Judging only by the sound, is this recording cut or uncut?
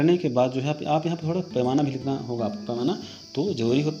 cut